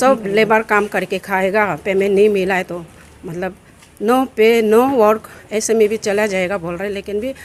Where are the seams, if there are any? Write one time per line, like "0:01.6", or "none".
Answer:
none